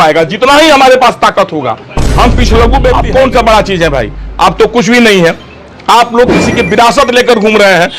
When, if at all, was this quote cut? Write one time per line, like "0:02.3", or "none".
0:03.0